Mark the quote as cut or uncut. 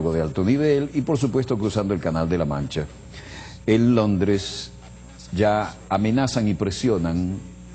cut